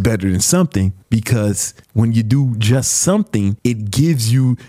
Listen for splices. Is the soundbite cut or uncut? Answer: cut